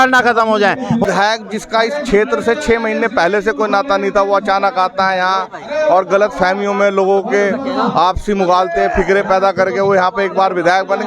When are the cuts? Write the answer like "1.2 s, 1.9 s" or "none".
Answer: 1.0 s